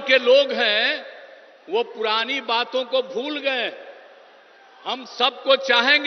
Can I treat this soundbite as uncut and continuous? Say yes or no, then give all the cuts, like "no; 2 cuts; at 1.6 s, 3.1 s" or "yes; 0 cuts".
yes; 0 cuts